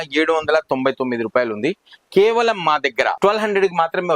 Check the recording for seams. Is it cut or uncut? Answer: cut